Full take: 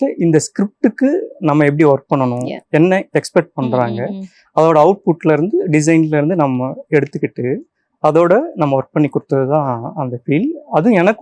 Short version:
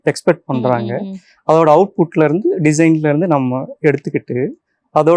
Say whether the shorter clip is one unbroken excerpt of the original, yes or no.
yes